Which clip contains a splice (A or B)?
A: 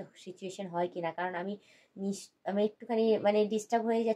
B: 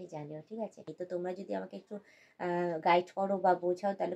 B